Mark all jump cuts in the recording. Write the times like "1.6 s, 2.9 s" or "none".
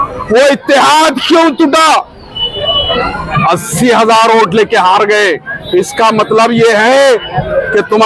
2.9 s